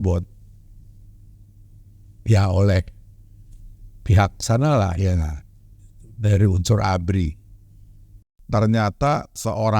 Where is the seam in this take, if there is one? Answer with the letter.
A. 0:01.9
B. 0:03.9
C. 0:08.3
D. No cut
C